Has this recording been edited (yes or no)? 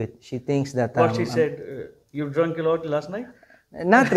no